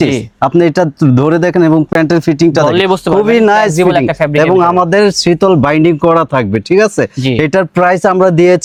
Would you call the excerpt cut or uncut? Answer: uncut